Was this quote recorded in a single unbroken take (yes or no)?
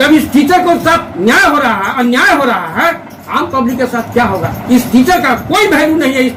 yes